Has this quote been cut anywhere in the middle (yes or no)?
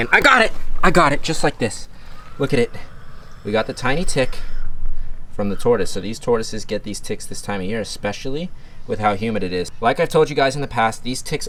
no